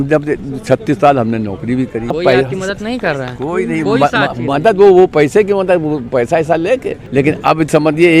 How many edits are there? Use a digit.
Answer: 2